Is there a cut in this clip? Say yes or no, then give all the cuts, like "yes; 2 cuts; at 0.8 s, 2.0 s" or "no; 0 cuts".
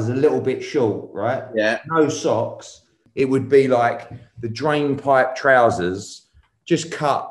yes; 1 cut; at 3.0 s